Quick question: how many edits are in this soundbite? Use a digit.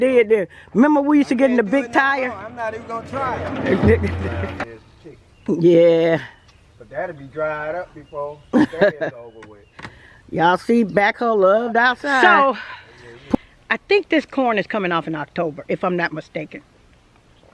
2